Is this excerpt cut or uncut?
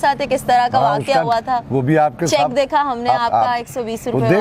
uncut